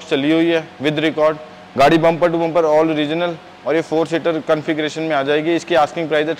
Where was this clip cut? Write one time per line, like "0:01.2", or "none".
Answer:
none

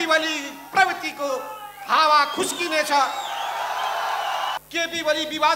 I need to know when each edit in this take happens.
0:04.6

